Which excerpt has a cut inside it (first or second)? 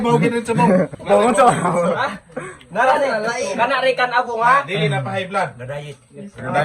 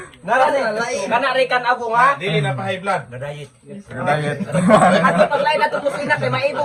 first